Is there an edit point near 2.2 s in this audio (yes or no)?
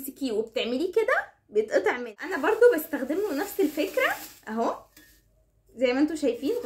yes